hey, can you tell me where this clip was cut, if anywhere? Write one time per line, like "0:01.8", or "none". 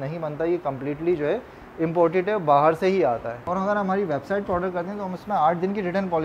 0:03.5

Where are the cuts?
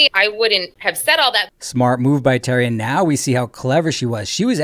0:01.3

